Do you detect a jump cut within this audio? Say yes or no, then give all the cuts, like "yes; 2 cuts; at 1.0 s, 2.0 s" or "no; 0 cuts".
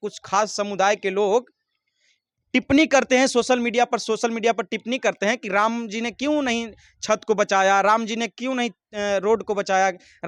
no; 0 cuts